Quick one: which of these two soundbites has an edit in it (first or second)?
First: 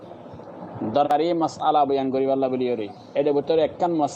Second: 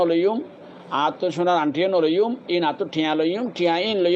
first